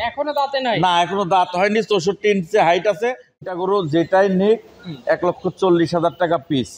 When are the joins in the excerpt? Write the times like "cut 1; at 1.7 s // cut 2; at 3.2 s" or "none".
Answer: cut 1; at 3.4 s